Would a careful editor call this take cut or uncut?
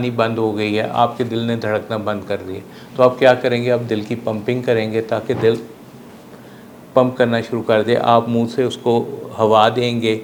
uncut